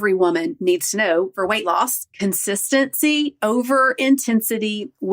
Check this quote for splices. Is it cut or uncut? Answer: cut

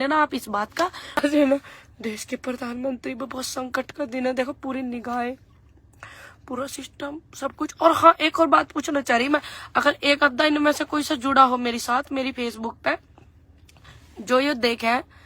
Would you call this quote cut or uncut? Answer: cut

